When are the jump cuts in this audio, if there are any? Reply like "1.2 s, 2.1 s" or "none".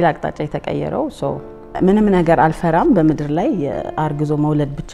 1.7 s